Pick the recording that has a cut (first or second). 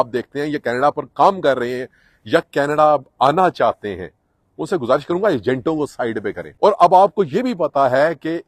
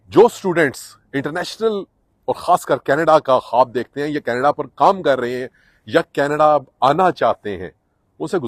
first